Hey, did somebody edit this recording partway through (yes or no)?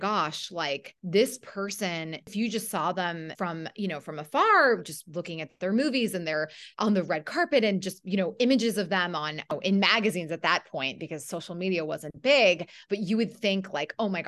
yes